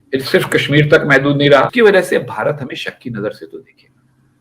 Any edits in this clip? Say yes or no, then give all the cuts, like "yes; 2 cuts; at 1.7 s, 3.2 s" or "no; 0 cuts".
yes; 1 cut; at 1.7 s